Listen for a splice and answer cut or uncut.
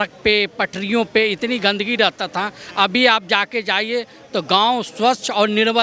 uncut